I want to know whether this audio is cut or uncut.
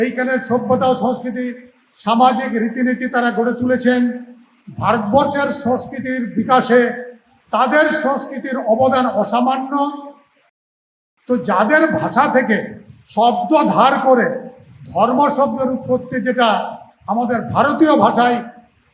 cut